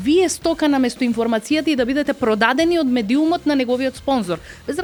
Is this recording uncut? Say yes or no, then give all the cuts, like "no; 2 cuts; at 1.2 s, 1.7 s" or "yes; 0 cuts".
yes; 0 cuts